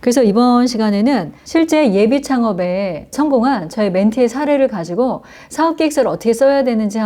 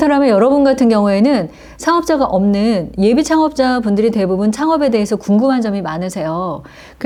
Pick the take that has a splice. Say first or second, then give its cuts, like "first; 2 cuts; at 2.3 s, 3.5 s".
first; 2 cuts; at 1.3 s, 3.0 s